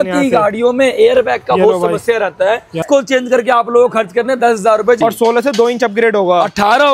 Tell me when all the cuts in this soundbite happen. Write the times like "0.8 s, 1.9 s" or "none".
2.8 s, 5.0 s